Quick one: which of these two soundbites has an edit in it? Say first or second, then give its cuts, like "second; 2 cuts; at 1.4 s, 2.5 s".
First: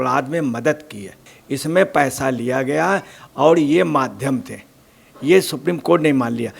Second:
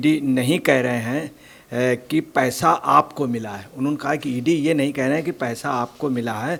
first; 1 cut; at 1.3 s